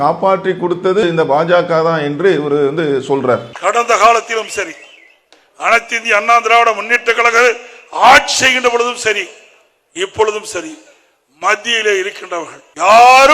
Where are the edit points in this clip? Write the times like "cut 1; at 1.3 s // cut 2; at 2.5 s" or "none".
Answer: cut 1; at 1.0 s // cut 2; at 3.5 s